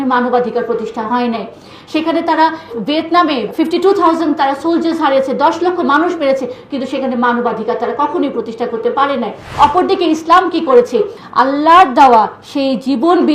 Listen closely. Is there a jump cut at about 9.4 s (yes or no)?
yes